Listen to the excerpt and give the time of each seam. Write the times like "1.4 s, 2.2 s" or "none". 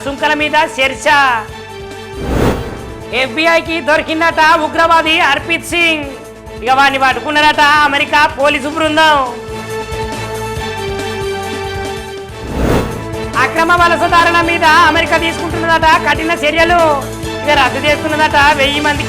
2.2 s, 12.5 s